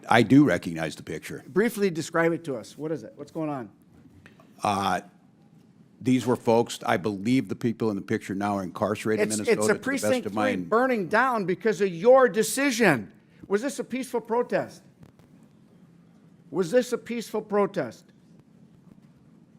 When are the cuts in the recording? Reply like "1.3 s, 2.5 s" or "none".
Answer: 6.9 s